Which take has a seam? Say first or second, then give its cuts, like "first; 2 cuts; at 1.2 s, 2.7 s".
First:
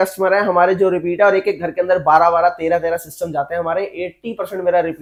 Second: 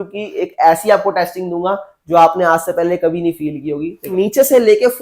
second; 1 cut; at 4.1 s